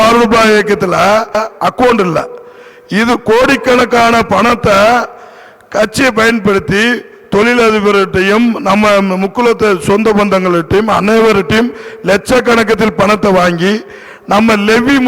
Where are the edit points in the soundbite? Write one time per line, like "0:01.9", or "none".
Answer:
0:01.4